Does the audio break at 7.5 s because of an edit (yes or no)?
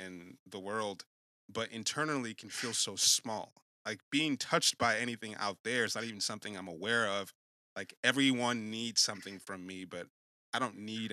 no